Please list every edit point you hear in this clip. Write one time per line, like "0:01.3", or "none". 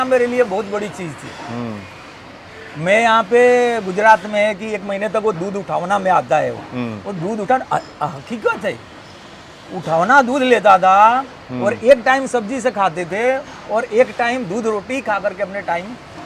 none